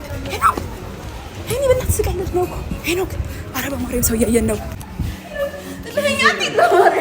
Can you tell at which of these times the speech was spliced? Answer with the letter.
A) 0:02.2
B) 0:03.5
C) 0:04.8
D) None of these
C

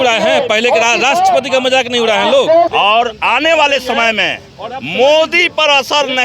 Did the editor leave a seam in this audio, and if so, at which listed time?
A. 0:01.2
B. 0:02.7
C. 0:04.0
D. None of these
B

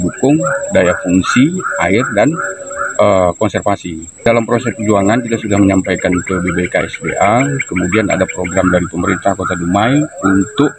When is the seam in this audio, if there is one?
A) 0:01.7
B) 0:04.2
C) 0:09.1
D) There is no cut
B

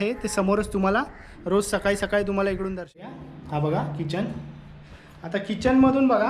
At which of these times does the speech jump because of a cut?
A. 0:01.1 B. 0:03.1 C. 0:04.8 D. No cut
B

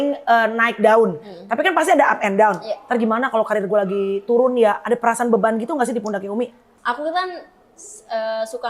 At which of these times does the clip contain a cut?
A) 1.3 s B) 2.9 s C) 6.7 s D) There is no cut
C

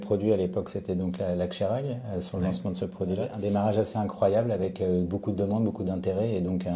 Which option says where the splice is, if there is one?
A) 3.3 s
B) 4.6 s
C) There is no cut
A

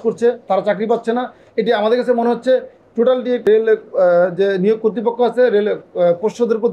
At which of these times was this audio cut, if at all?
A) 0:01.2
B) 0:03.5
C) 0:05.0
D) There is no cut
B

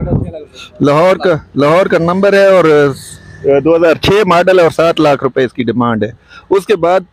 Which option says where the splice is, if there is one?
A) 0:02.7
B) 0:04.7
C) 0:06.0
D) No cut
D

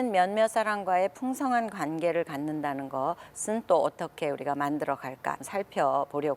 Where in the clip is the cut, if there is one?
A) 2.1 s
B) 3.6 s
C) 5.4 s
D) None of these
C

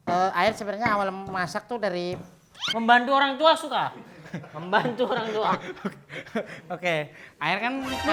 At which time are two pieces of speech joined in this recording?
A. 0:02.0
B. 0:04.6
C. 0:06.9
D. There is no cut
D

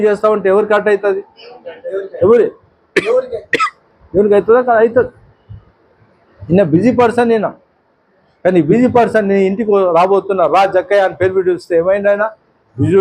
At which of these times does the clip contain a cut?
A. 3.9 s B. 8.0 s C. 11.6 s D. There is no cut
D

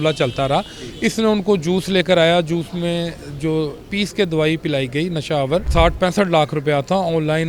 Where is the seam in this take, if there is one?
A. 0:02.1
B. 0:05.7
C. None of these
B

